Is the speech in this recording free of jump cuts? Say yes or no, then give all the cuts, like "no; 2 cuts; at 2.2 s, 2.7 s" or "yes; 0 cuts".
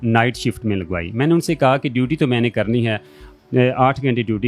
yes; 0 cuts